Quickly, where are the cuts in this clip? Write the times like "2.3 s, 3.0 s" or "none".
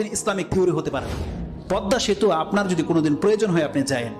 1.6 s